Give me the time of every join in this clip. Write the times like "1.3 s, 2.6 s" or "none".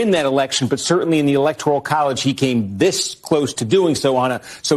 none